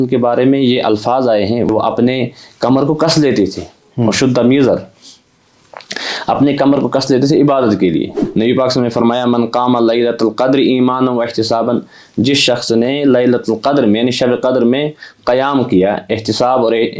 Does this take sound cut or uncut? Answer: cut